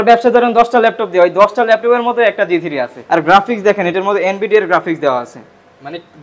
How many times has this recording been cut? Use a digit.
1